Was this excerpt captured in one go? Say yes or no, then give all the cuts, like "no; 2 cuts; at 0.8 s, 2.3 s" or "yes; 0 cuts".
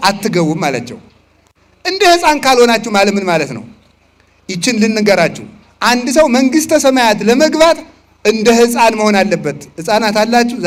yes; 0 cuts